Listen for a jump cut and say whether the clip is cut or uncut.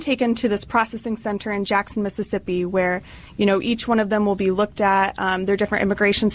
uncut